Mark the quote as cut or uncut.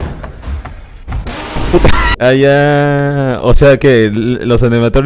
cut